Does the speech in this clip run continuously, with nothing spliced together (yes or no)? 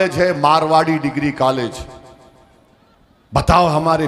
yes